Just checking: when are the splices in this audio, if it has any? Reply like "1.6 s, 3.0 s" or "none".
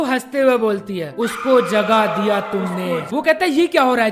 3.1 s